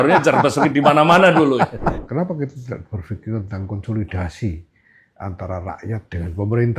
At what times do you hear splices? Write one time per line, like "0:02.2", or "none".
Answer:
0:01.9

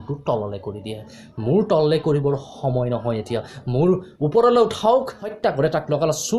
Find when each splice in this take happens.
0:05.3

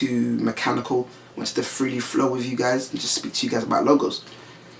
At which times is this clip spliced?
none

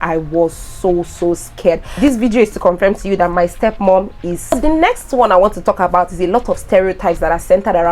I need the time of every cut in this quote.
0:01.9
0:04.5

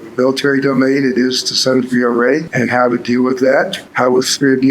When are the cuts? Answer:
0:02.5
0:03.8

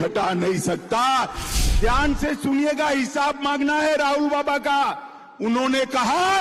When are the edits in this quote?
0:01.4

